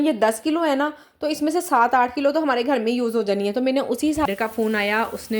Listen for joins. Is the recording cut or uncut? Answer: cut